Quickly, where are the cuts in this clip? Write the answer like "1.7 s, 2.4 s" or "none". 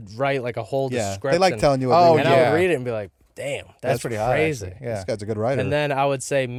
none